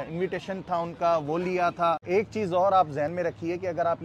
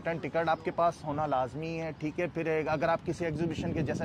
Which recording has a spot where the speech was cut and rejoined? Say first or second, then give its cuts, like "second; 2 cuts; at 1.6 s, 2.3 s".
first; 1 cut; at 2.0 s